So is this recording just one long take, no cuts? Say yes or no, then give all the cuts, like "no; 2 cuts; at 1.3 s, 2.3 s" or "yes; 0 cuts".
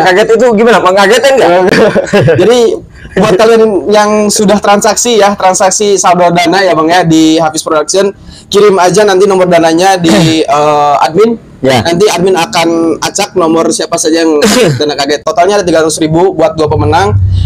yes; 0 cuts